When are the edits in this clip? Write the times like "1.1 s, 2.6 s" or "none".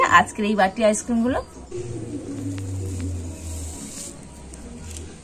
1.6 s